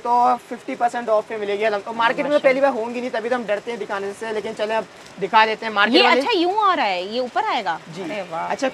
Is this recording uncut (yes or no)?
yes